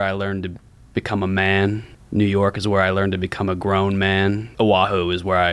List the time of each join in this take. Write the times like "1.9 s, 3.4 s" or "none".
1.9 s, 4.5 s